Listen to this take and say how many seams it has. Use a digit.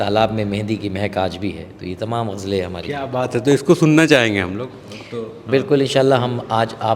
0